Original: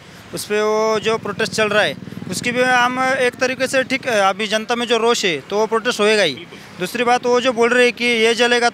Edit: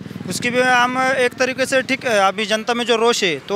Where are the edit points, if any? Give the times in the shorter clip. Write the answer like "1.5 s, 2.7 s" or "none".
none